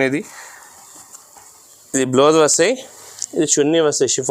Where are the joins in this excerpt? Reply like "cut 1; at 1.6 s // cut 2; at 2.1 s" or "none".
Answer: none